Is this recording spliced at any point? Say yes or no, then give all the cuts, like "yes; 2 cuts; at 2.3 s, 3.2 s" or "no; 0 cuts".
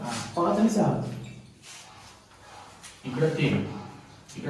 no; 0 cuts